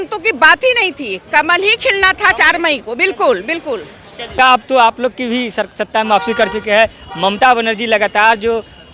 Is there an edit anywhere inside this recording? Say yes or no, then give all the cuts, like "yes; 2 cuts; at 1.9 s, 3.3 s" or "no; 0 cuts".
no; 0 cuts